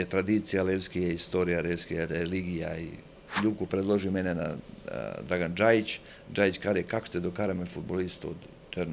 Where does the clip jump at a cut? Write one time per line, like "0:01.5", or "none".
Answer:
0:03.4